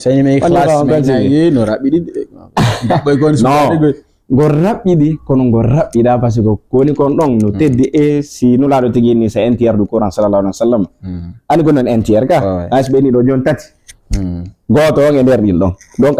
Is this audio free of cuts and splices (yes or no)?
yes